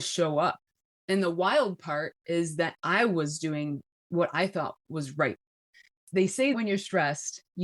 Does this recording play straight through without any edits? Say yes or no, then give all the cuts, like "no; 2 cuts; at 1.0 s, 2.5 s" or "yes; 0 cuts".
yes; 0 cuts